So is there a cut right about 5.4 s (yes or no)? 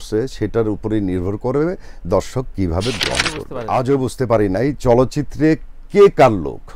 no